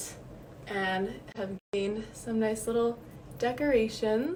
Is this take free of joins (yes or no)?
yes